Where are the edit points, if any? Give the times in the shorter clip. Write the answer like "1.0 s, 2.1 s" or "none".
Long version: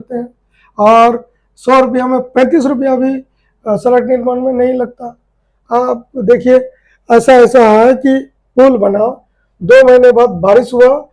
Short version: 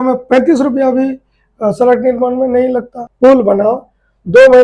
3.0 s